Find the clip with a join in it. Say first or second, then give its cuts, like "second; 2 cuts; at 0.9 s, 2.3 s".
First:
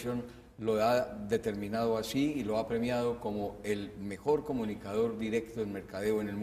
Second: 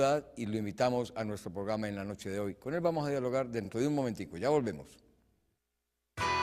first; 1 cut; at 3.5 s